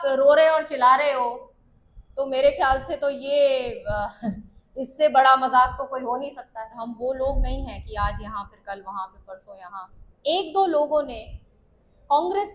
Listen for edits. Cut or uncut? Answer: cut